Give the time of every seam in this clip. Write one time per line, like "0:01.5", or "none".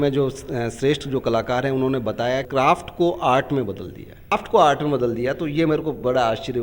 0:02.5
0:04.3